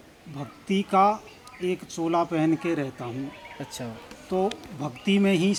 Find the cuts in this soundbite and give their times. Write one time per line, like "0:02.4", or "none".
none